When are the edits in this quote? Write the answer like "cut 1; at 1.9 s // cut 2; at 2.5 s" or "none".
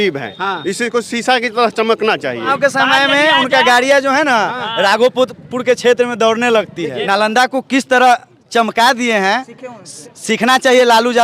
cut 1; at 2.5 s // cut 2; at 7.0 s